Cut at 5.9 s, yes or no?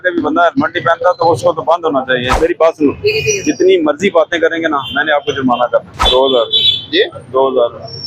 yes